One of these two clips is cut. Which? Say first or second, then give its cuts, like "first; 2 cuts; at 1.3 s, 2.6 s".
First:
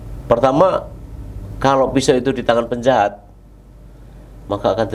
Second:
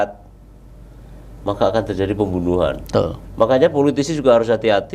second; 1 cut; at 3.2 s